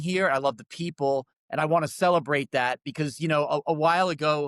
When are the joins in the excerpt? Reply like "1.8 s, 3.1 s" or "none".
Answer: 1.4 s